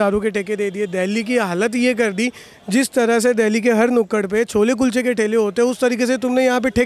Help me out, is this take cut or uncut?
uncut